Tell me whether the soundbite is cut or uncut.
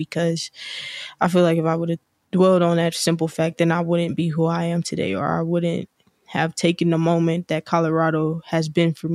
uncut